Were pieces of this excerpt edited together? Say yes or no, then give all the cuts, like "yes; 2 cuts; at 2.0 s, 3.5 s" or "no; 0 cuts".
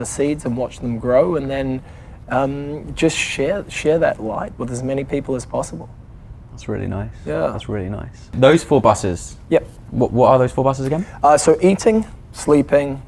no; 0 cuts